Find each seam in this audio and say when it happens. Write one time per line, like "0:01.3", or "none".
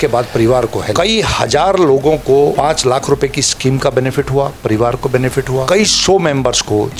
0:00.9
0:02.5
0:05.6